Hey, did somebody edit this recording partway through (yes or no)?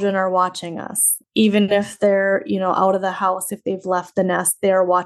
no